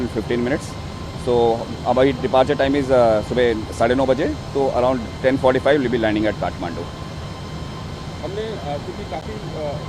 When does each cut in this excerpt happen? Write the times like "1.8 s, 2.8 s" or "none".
none